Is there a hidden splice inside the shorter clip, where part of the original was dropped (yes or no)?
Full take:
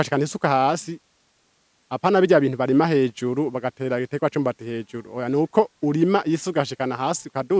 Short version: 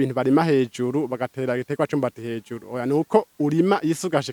no